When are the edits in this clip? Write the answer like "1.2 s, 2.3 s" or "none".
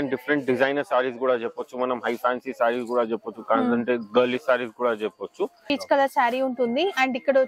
5.6 s